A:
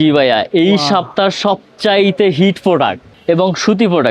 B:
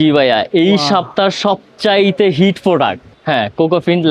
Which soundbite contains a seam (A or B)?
A